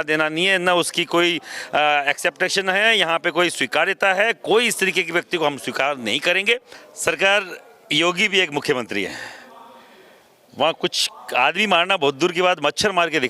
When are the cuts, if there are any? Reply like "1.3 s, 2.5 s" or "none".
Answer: 6.7 s